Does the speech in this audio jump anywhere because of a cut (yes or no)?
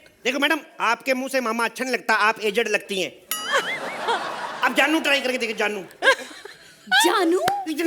no